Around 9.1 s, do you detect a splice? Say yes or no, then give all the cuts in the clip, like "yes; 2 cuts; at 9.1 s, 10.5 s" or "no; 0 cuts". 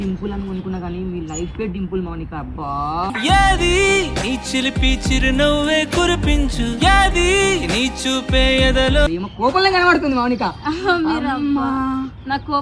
yes; 1 cut; at 9.1 s